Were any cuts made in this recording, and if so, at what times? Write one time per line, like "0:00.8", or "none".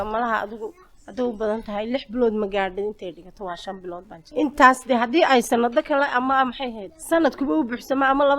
0:04.2
0:06.9